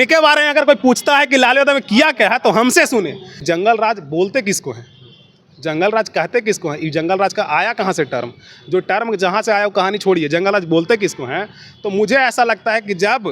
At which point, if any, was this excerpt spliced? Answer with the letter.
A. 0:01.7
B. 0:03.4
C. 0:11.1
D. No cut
B